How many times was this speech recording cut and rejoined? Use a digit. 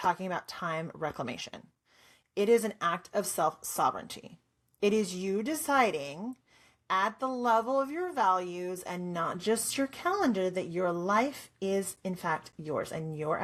0